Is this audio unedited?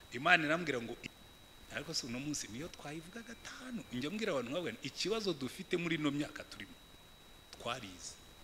no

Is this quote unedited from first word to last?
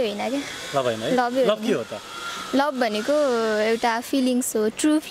yes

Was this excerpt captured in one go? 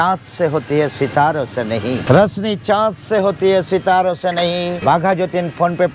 no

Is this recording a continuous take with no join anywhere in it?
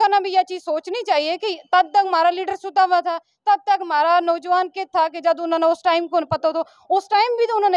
yes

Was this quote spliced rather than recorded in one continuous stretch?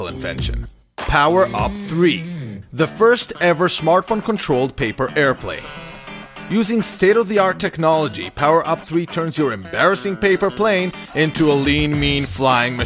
no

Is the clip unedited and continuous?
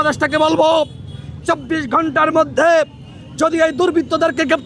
yes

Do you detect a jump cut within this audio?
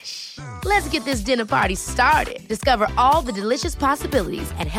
no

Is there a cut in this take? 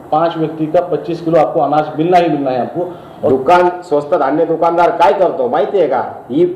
yes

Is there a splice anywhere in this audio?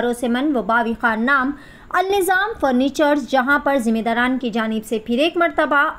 no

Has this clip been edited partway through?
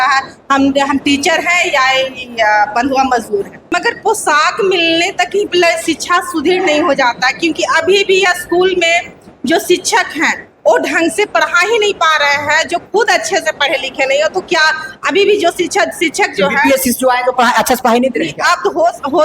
yes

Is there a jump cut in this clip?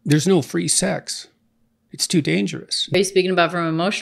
yes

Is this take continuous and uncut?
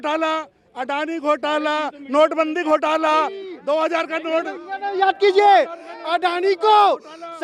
yes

